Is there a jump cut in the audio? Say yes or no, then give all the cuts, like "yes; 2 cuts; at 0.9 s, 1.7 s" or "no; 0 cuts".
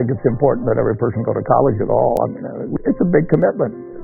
yes; 1 cut; at 2.7 s